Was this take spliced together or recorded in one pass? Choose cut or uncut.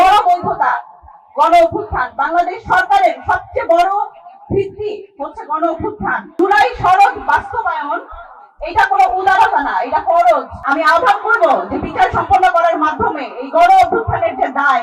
cut